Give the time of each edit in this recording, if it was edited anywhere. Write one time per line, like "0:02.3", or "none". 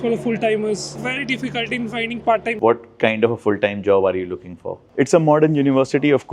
0:01.0
0:02.5
0:04.7